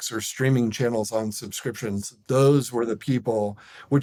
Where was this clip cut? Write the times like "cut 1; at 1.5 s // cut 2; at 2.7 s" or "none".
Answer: none